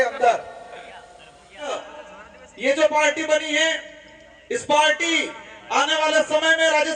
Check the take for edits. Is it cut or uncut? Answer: cut